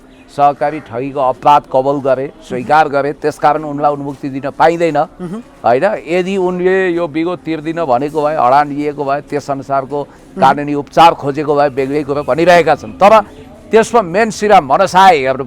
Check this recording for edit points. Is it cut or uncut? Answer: uncut